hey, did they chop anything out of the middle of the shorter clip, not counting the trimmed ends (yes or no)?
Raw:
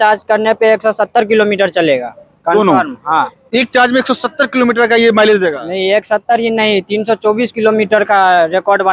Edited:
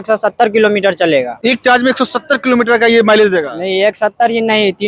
yes